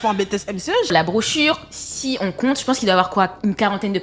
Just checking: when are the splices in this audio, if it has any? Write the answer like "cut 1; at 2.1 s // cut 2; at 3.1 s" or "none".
cut 1; at 0.9 s